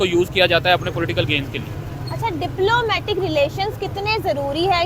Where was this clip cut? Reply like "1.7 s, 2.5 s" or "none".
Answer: none

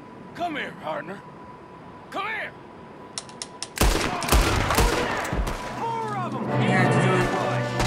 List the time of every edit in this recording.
none

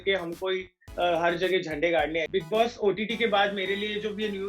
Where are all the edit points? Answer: 2.3 s

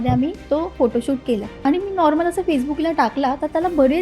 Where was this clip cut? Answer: 1.5 s

